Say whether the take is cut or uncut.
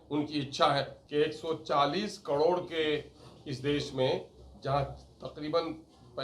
cut